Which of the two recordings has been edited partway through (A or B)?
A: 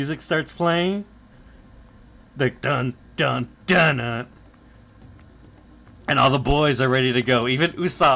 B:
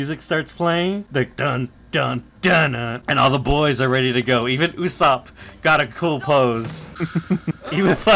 B